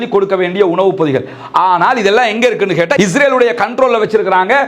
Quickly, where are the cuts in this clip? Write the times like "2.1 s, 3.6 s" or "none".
2.9 s